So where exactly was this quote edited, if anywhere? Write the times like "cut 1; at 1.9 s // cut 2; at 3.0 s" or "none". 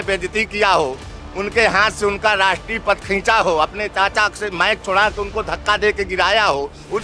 none